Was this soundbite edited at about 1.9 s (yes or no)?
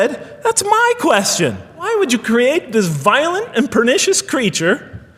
yes